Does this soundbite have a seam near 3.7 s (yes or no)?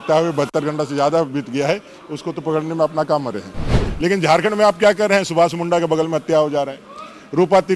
yes